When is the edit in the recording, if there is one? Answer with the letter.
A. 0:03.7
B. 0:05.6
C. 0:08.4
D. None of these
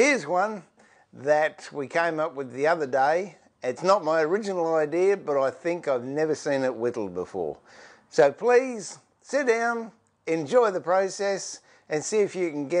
C